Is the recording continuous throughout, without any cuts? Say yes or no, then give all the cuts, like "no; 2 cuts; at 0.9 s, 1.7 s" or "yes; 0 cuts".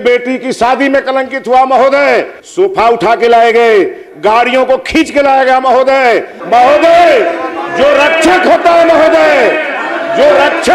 no; 2 cuts; at 2.4 s, 6.3 s